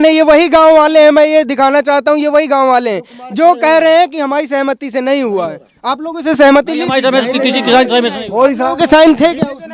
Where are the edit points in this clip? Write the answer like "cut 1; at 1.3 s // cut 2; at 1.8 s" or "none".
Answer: none